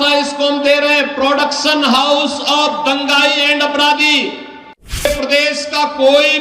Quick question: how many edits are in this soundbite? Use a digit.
1